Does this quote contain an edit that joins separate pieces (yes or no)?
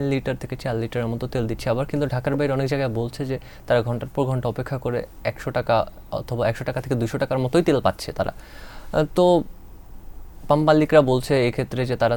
no